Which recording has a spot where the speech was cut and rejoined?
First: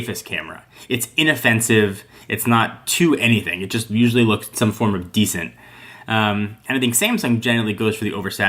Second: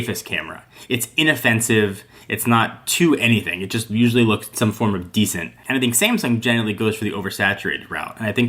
second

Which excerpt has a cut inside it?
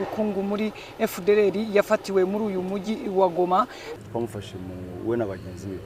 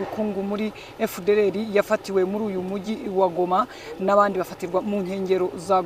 first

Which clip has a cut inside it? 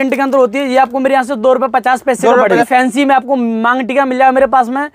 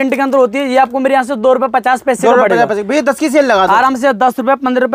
first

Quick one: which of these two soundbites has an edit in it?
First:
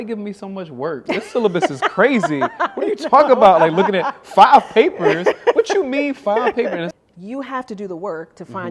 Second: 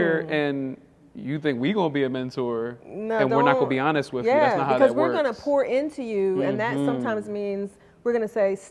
first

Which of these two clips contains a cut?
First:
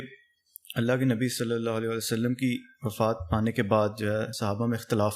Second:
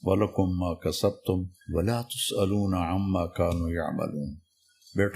second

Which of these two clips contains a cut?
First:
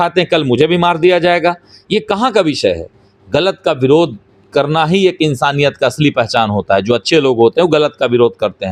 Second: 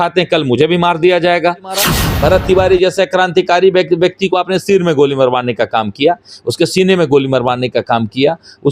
second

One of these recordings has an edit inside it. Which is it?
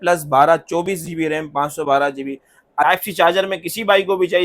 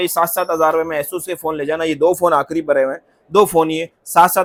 first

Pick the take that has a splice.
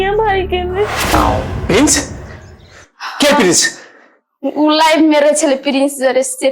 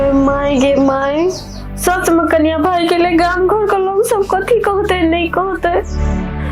first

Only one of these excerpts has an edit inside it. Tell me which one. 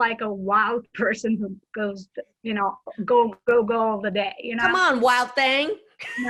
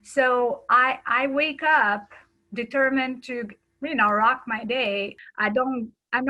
second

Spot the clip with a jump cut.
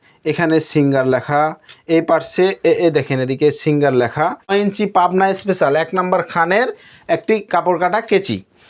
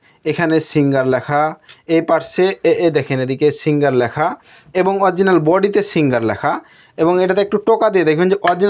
first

